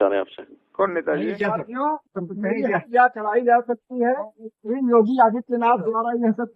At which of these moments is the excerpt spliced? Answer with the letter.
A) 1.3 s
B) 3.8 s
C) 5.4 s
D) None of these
A